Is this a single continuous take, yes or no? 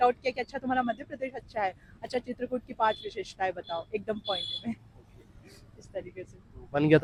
yes